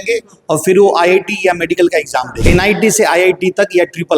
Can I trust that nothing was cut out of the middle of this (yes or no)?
no